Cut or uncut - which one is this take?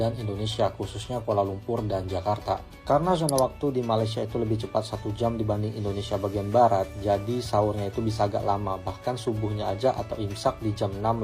uncut